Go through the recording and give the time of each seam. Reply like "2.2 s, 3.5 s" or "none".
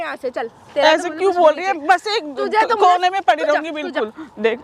none